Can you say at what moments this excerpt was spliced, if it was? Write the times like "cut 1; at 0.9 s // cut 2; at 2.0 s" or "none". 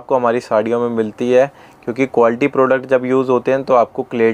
none